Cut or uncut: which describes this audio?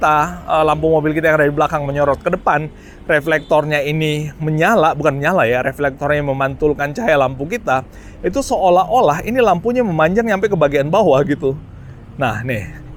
uncut